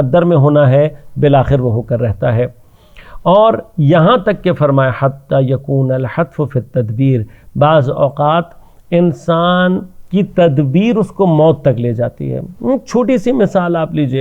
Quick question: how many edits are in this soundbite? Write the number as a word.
zero